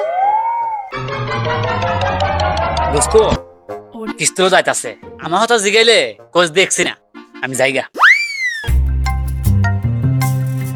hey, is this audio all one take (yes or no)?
yes